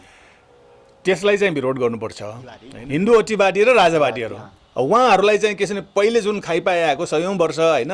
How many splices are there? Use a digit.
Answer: 1